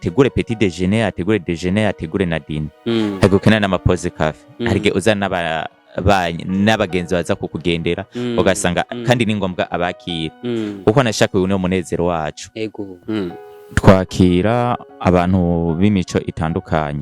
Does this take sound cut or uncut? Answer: cut